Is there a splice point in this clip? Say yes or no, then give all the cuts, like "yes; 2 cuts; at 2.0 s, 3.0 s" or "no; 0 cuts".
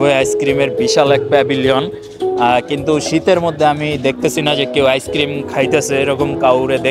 no; 0 cuts